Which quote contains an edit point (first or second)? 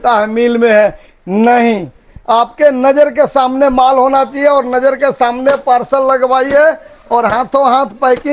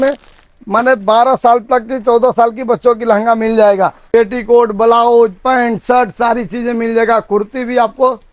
second